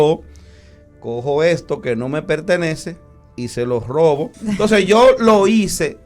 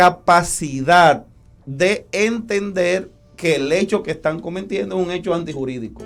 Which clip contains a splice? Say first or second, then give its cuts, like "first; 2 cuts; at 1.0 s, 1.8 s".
first; 1 cut; at 4.3 s